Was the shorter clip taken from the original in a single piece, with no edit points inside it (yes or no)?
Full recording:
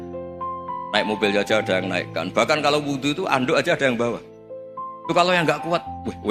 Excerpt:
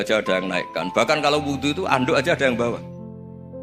yes